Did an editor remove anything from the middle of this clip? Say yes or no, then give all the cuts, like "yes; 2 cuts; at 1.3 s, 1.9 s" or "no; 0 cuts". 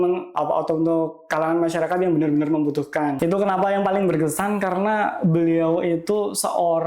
yes; 1 cut; at 3.2 s